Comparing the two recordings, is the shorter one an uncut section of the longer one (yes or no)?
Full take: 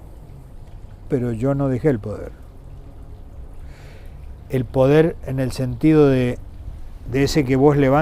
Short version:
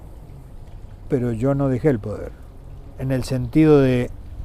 no